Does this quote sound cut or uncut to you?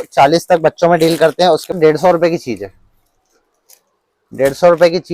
cut